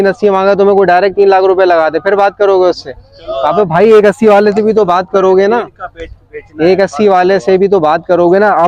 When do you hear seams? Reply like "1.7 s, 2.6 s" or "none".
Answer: none